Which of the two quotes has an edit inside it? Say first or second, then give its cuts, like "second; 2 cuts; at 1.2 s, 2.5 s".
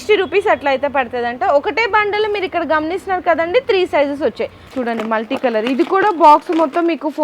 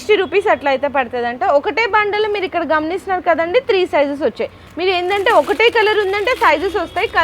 first; 1 cut; at 4.7 s